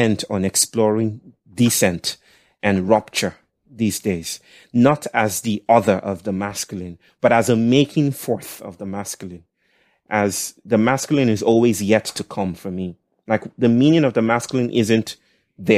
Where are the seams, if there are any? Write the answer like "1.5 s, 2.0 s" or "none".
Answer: 1.4 s